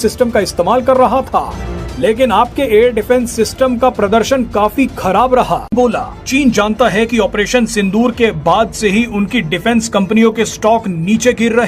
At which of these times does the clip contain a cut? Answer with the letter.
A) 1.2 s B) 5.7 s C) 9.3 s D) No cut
B